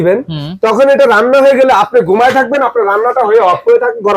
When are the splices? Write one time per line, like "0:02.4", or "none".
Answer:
none